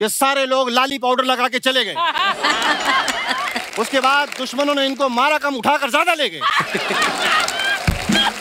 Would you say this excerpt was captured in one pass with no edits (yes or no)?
yes